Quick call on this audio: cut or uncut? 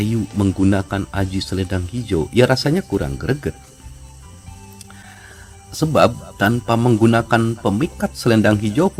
uncut